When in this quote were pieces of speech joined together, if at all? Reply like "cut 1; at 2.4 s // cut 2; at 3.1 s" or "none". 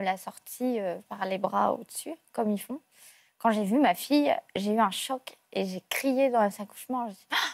none